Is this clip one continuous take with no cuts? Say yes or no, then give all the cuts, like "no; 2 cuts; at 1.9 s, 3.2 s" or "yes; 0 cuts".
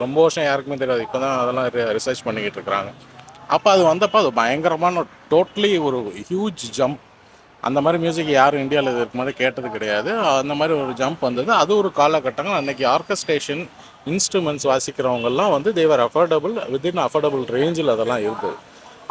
yes; 0 cuts